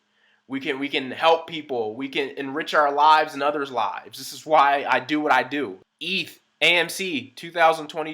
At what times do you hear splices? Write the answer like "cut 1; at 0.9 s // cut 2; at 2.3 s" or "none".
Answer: cut 1; at 5.9 s